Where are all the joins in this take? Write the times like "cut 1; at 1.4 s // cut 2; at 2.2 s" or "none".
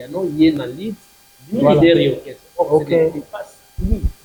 none